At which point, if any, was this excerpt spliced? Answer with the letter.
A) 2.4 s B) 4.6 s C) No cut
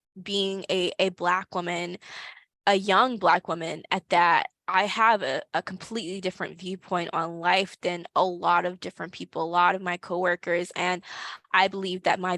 B